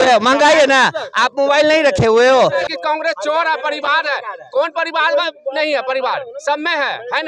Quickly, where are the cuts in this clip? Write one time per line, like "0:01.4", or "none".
0:02.7